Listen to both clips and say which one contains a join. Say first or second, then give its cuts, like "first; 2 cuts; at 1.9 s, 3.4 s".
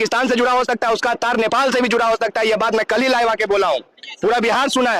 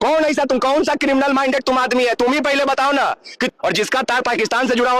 second; 1 cut; at 3.5 s